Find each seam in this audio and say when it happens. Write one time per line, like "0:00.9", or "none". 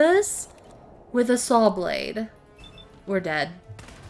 none